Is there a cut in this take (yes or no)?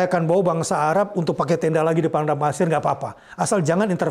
no